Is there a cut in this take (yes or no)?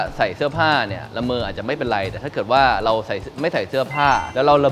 no